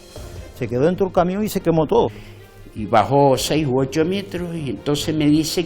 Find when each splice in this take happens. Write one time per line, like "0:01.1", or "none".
0:02.2